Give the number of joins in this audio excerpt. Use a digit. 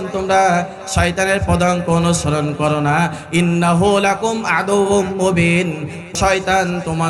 1